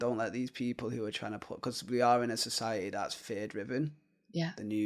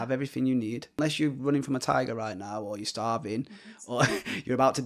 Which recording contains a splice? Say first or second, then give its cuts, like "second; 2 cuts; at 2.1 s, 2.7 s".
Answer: second; 1 cut; at 1.0 s